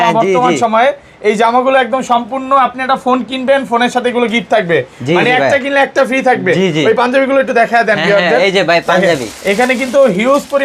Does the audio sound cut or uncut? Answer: uncut